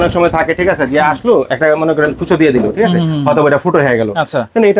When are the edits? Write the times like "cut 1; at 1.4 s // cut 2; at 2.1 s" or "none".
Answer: none